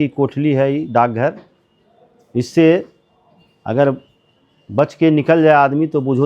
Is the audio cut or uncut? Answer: uncut